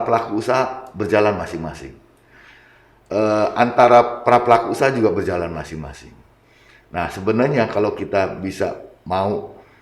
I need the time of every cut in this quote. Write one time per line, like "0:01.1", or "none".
none